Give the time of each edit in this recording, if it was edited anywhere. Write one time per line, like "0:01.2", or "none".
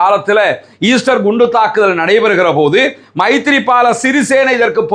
none